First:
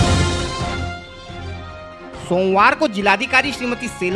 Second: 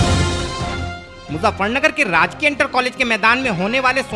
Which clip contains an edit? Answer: second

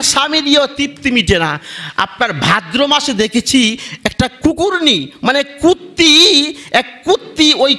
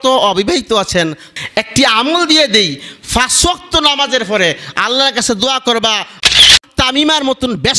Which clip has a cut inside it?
second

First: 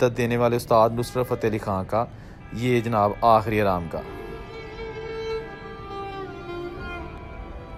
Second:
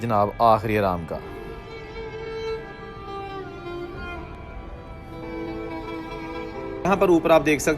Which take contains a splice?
second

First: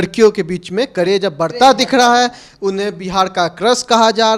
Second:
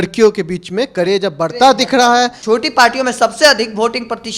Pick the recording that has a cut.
second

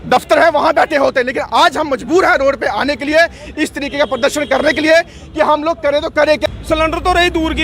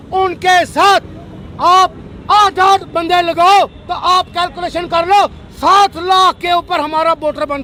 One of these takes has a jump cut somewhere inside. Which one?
first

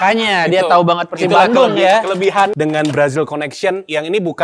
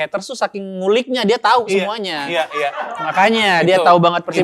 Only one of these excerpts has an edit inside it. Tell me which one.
first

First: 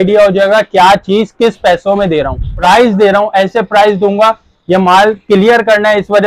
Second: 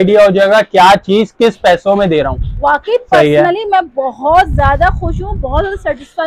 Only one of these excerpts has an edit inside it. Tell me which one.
first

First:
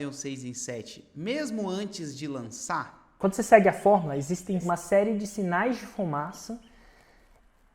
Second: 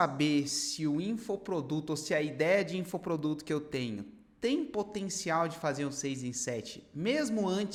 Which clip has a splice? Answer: first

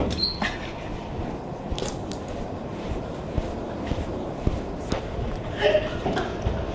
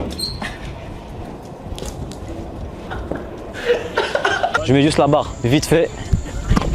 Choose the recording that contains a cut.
second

